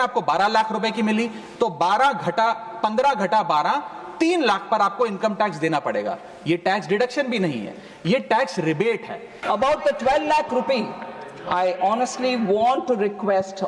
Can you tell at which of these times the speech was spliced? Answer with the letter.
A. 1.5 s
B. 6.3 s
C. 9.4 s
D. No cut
C